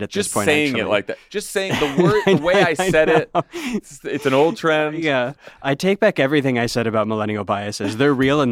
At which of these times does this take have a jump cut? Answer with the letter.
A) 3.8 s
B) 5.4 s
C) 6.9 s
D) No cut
B